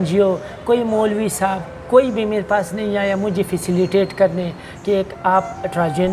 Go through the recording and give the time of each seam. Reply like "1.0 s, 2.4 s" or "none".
none